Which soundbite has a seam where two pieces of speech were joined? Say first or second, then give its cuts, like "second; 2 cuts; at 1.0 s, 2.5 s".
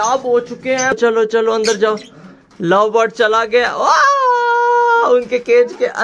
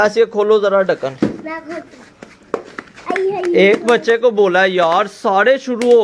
first; 1 cut; at 1.0 s